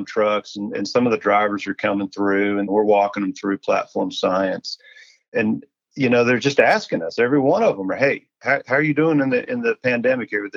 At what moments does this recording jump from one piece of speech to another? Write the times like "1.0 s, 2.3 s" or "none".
2.7 s, 5.3 s

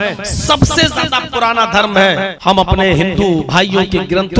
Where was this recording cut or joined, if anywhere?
2.3 s, 3.5 s

